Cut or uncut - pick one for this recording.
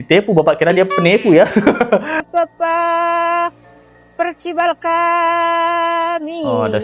cut